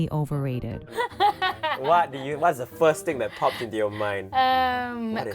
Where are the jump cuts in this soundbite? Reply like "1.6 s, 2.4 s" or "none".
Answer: none